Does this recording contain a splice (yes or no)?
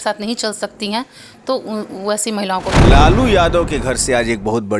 yes